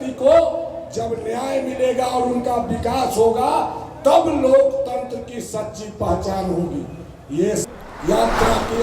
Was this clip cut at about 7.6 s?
yes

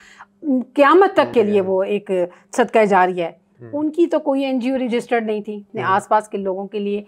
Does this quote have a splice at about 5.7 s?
yes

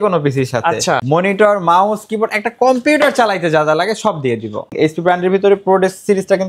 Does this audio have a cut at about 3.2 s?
no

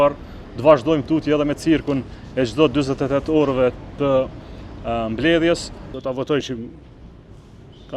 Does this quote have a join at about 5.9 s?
yes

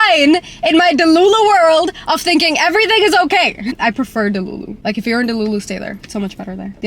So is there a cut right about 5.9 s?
no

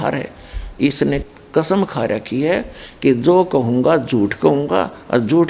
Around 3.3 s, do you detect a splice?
no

